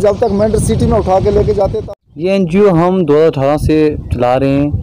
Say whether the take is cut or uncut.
cut